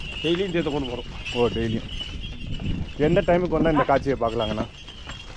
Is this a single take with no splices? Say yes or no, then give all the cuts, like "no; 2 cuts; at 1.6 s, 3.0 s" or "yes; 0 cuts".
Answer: yes; 0 cuts